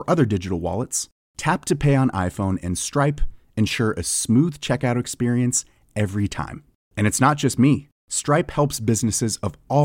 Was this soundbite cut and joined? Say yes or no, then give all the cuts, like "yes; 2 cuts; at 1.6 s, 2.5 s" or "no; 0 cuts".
no; 0 cuts